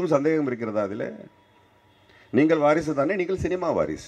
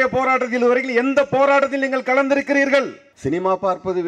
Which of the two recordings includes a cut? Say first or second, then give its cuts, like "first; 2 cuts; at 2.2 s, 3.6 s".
second; 1 cut; at 3.0 s